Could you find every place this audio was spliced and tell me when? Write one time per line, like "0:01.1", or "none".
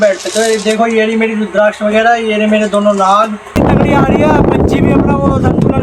0:03.6

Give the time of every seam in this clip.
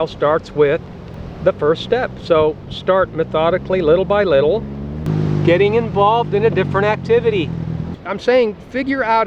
0:08.0

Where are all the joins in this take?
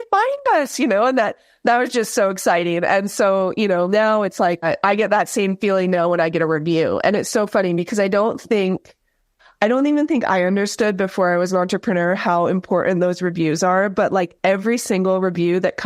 0:04.6

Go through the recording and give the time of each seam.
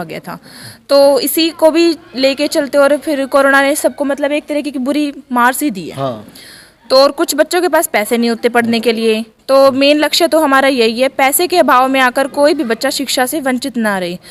none

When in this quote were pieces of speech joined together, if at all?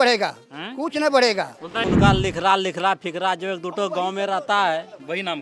0:01.9

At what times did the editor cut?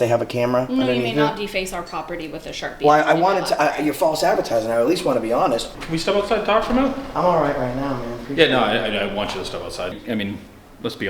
0:05.7
0:09.9

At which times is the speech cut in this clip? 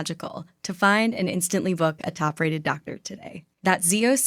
none

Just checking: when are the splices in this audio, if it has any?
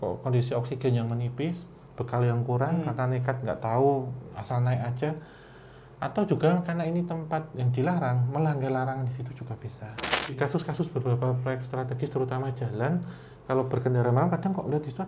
0:10.4

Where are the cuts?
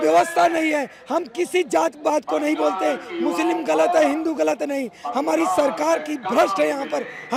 none

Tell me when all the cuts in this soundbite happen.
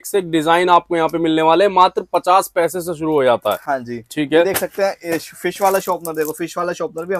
none

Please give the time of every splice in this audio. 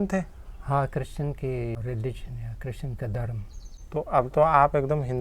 0:01.8

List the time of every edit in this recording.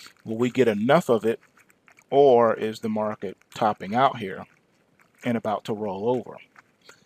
0:04.0

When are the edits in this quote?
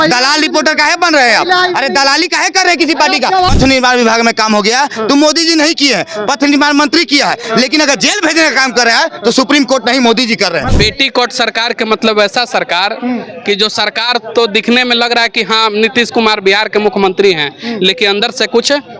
0:03.5
0:10.6

